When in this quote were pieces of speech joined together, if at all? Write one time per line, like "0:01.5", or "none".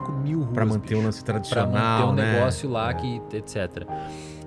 none